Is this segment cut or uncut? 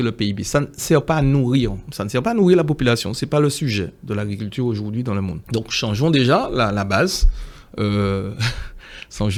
uncut